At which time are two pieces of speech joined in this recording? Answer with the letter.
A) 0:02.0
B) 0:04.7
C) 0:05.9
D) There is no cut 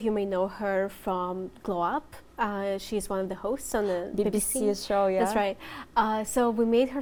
D